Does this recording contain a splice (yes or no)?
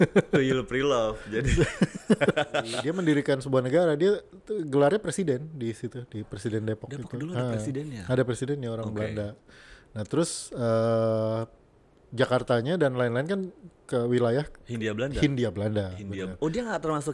yes